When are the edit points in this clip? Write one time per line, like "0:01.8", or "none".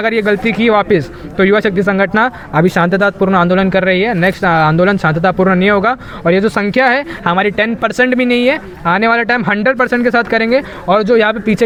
none